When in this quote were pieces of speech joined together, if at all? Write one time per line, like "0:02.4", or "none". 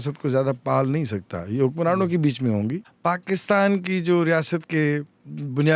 0:02.9